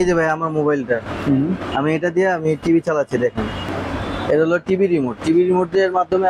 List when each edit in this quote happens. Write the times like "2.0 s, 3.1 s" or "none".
1.7 s, 3.7 s